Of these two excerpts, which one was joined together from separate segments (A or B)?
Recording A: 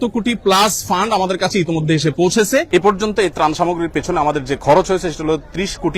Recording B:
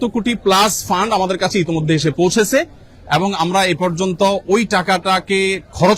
A